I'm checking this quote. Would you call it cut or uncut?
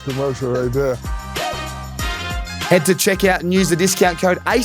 cut